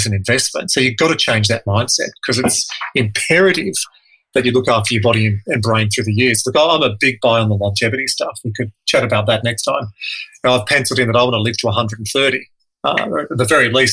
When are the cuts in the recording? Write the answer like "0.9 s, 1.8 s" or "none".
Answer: none

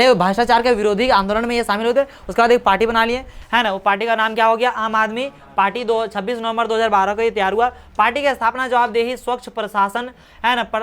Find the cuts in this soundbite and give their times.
none

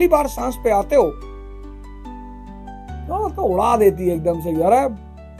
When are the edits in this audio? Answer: 1.6 s, 3.1 s

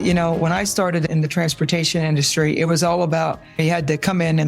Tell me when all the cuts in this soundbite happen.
1.1 s, 3.6 s

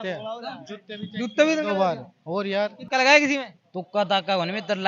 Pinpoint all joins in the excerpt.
2.8 s

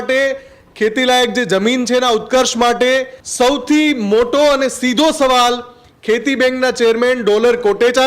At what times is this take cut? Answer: 3.2 s

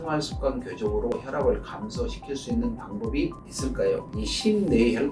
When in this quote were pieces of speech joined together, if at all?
4.1 s

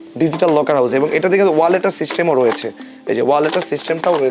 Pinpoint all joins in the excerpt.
none

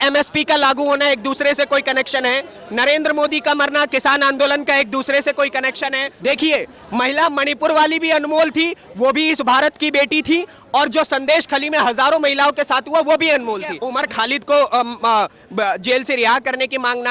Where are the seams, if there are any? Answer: 6.1 s, 13.8 s

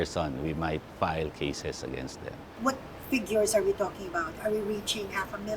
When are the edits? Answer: 2.5 s

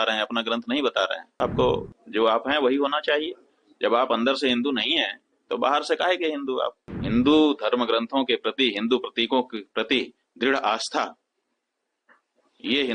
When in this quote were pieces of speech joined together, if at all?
1.3 s, 6.8 s

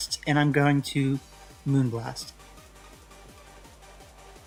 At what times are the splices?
none

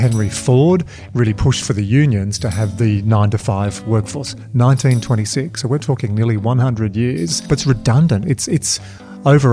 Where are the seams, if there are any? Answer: none

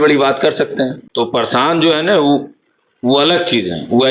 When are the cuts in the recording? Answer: 1.0 s

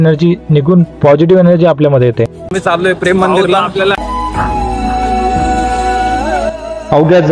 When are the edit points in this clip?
2.5 s, 4.0 s

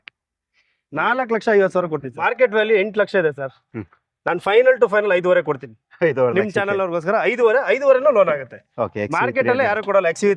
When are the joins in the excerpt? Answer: 2.1 s

